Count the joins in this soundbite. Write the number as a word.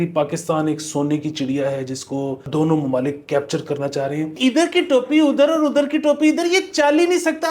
two